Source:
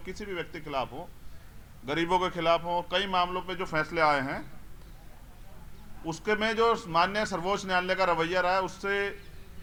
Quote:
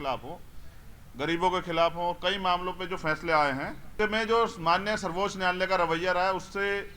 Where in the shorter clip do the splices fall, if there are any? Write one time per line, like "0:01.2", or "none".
0:03.9